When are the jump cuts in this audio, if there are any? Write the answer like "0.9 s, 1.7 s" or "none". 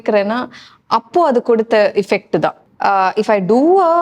2.6 s